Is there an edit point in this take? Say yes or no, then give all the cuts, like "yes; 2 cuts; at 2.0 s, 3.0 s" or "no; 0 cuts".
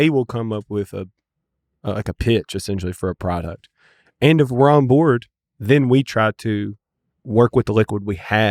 no; 0 cuts